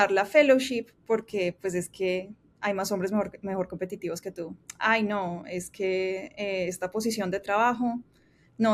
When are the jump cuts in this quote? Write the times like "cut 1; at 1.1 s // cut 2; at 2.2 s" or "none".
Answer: none